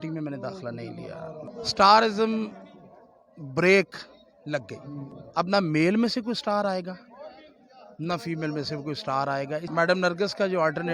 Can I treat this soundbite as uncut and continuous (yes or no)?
no